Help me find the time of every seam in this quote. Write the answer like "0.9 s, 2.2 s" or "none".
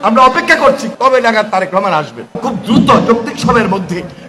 0.9 s, 2.4 s